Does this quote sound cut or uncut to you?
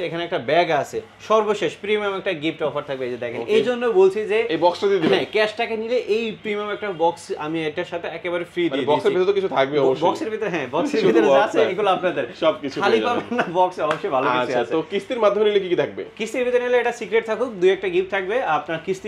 uncut